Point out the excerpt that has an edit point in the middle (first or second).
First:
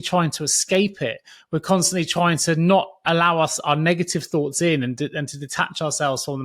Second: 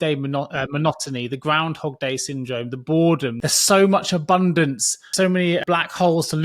second